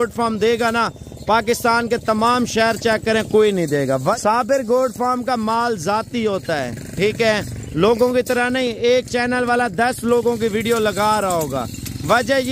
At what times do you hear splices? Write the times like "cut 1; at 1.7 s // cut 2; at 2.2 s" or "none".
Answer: cut 1; at 4.2 s